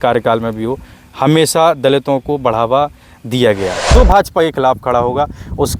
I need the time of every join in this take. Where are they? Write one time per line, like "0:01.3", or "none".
0:03.9